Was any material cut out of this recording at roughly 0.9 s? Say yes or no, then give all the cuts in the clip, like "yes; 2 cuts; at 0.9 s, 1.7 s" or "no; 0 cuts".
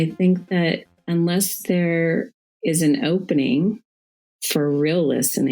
yes; 1 cut; at 0.9 s